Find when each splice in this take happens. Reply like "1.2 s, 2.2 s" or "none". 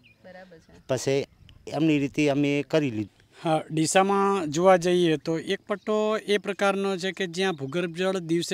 3.0 s